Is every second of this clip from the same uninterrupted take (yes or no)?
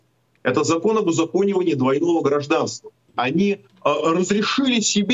no